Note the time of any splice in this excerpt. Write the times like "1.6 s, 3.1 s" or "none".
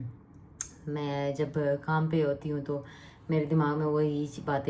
none

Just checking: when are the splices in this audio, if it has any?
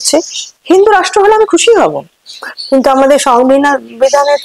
none

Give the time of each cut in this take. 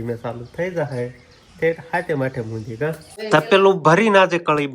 3.2 s

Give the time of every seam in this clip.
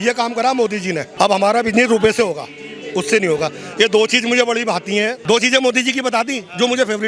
1.1 s, 5.2 s

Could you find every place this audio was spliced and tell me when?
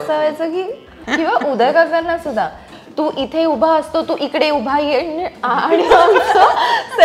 0.9 s, 2.8 s

